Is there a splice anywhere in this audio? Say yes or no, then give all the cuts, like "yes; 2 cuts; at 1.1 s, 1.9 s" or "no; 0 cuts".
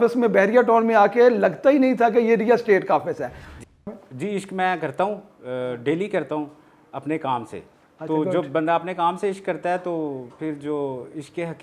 yes; 1 cut; at 3.7 s